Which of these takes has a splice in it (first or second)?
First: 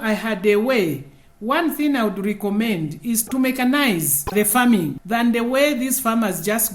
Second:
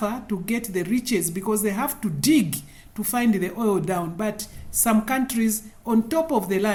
first